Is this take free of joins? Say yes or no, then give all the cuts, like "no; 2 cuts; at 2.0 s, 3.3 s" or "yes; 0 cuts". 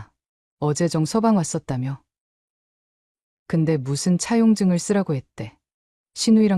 yes; 0 cuts